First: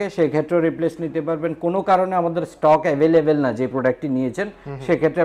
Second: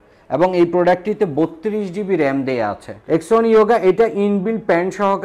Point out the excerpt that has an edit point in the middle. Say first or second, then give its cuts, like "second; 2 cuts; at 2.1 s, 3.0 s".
second; 1 cut; at 3.0 s